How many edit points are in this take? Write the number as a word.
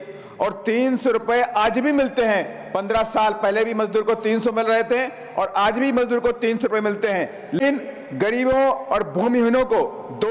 one